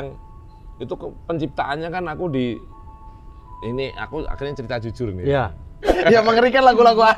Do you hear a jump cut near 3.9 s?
no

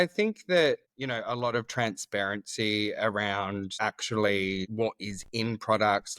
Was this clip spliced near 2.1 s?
no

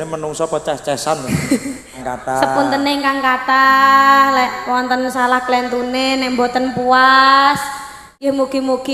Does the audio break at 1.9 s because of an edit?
yes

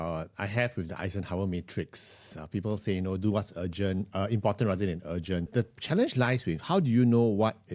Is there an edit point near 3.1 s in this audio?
no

